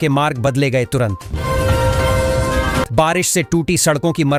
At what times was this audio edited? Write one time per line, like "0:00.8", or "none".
none